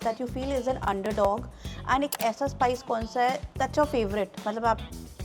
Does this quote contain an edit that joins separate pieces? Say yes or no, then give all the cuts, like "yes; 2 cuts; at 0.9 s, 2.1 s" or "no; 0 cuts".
yes; 1 cut; at 3.5 s